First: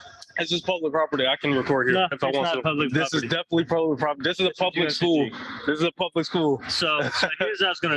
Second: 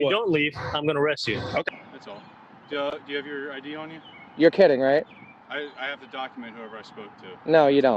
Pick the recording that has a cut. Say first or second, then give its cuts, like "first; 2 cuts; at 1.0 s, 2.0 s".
second; 1 cut; at 1.7 s